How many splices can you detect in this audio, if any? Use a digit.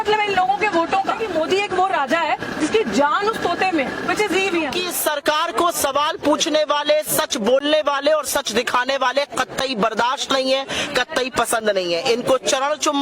2